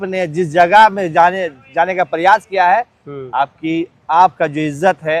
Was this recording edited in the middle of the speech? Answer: no; 0 cuts

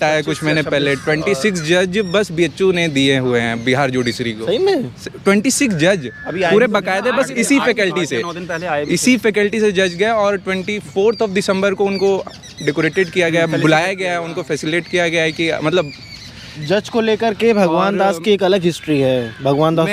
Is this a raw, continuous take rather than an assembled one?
yes; 0 cuts

